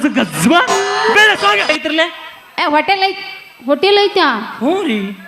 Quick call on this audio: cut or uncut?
cut